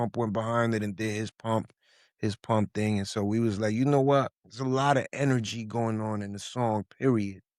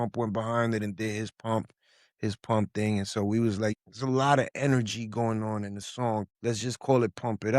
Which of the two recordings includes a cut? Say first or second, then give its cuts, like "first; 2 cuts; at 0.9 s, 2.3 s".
second; 2 cuts; at 3.7 s, 6.3 s